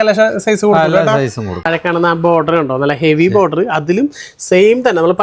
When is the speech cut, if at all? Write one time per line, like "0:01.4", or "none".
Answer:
0:01.6